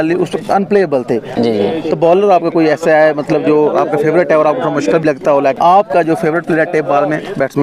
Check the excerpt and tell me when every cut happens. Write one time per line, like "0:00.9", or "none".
0:01.3
0:05.6